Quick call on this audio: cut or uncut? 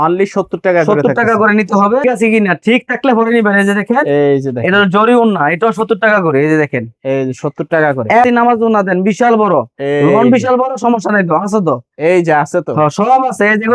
cut